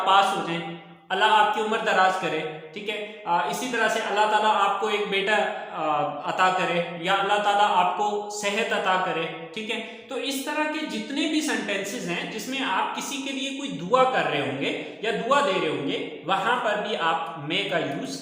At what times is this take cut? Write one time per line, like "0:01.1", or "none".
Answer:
none